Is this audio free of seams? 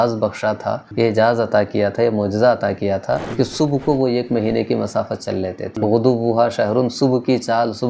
no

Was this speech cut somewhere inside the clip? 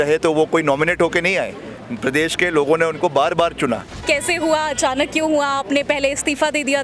yes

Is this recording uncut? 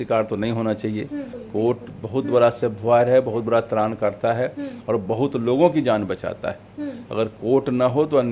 no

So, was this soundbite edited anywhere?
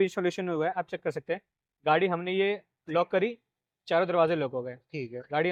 no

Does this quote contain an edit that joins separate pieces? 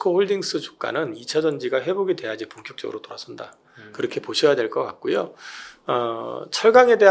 no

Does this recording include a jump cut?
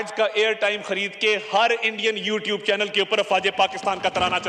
no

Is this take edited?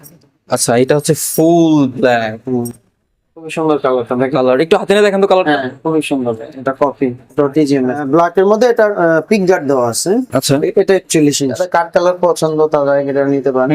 yes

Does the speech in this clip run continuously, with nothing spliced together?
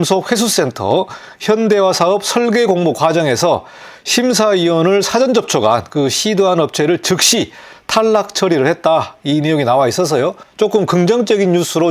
yes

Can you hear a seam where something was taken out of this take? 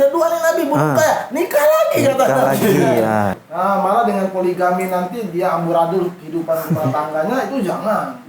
yes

